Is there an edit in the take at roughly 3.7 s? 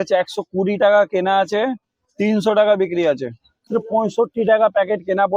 yes; 1 cut; at 3.7 s

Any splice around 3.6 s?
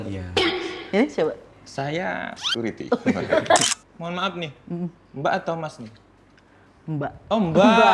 yes; 1 cut; at 3.6 s

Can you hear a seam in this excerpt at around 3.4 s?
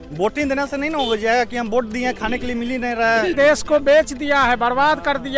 yes; 1 cut; at 3.4 s

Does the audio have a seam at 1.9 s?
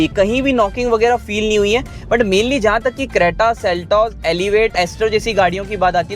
yes; 1 cut; at 1.9 s

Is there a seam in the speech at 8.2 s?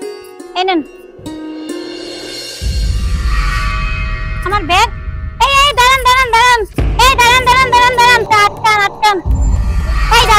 yes; 2 cuts; at 2.4 s, 8.2 s

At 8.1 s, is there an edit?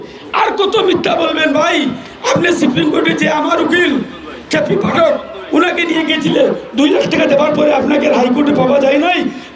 no; 0 cuts

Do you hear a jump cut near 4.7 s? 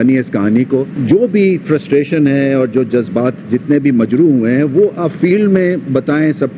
no; 1 cut; at 0.9 s

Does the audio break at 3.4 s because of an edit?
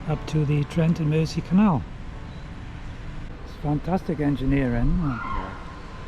yes; 1 cut; at 3.4 s

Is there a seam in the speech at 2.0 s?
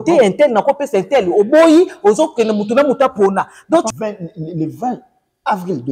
no; 1 cut; at 3.9 s

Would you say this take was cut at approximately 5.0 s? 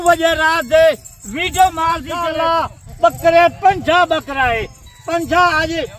no; 1 cut; at 2.2 s

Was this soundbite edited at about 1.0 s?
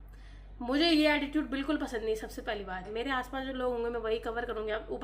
no; 1 cut; at 2.9 s

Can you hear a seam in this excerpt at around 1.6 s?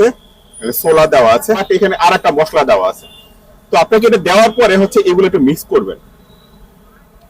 yes; 1 cut; at 1.6 s

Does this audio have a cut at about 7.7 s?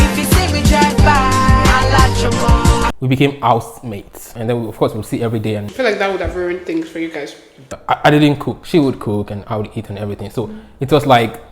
yes; 4 cuts; at 2.9 s, 4.2 s, 7.7 s, 8.5 s

